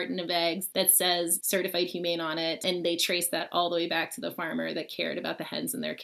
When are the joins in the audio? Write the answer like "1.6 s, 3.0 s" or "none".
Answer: 1.2 s, 2.6 s